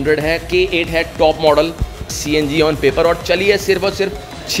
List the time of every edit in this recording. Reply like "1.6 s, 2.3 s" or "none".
2.1 s